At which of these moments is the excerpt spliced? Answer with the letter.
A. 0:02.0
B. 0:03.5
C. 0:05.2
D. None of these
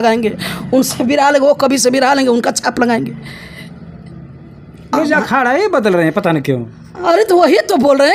D